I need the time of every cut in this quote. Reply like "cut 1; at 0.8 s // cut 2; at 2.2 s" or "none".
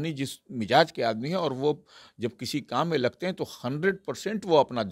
none

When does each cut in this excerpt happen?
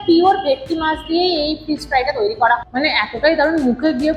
cut 1; at 2.7 s

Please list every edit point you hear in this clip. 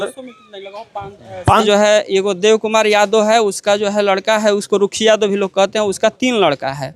cut 1; at 1.6 s

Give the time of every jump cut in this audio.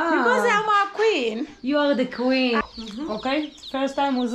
cut 1; at 2.6 s

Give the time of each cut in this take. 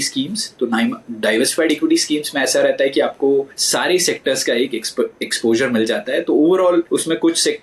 cut 1; at 3.6 s // cut 2; at 6.9 s

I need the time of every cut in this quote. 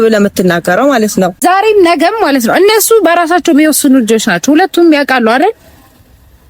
cut 1; at 1.3 s

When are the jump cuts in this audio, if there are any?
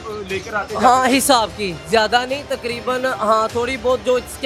none

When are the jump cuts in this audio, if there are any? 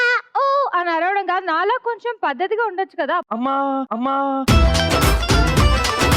none

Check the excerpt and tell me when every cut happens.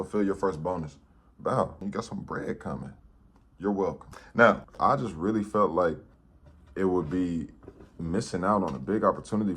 cut 1; at 1.8 s // cut 2; at 4.7 s

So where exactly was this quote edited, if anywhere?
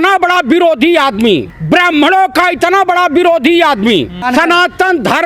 cut 1; at 1.5 s // cut 2; at 4.2 s

